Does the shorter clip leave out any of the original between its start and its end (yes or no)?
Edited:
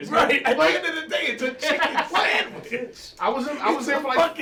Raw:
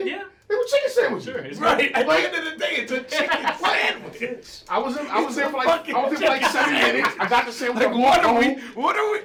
no